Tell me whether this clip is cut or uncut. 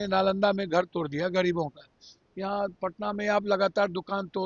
uncut